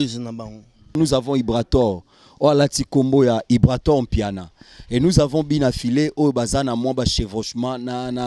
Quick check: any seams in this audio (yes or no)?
yes